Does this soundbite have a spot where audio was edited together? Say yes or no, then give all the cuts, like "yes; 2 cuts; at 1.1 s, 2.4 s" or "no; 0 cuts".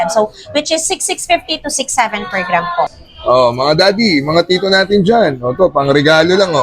yes; 1 cut; at 3.0 s